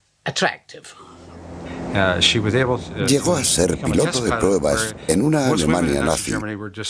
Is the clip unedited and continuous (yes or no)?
yes